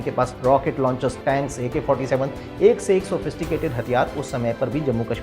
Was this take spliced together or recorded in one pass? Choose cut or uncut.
cut